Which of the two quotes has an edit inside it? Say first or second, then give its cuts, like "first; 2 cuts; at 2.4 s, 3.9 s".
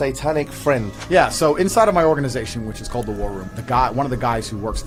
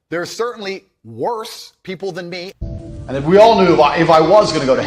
second; 1 cut; at 2.5 s